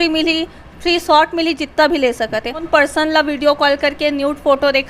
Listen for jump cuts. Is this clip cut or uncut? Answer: cut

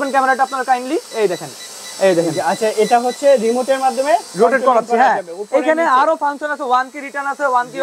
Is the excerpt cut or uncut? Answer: uncut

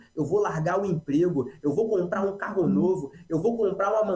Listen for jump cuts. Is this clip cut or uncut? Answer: uncut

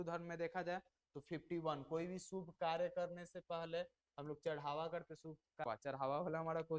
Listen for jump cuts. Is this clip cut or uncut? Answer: cut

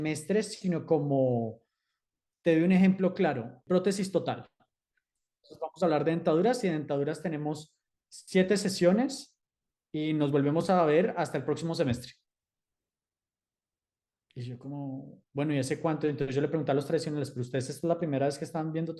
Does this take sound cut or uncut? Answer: cut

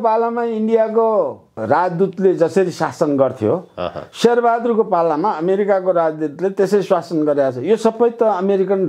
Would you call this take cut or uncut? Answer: uncut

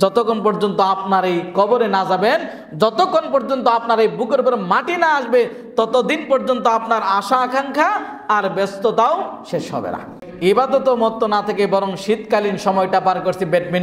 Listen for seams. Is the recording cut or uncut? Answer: cut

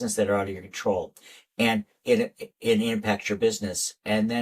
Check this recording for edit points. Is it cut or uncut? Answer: uncut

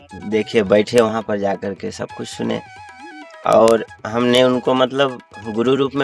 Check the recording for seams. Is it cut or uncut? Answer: uncut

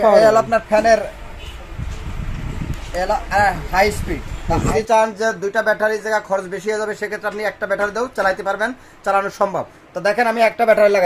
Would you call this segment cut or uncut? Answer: cut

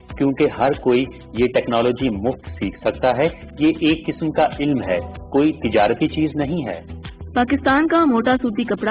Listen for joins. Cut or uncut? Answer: cut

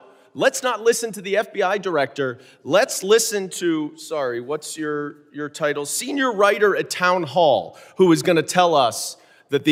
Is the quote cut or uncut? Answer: uncut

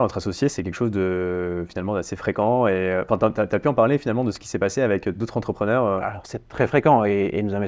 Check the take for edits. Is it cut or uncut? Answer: uncut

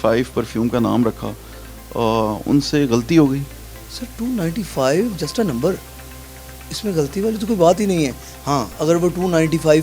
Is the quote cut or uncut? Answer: uncut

